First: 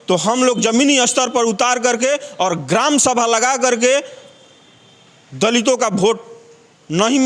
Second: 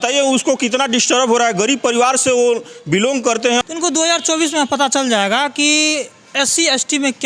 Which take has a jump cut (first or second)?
second